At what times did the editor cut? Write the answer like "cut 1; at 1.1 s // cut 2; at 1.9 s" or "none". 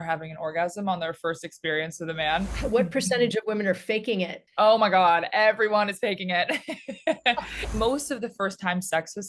cut 1; at 2.6 s // cut 2; at 4.4 s // cut 3; at 7.7 s